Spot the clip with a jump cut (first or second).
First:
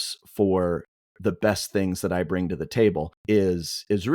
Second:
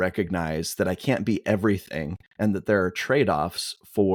first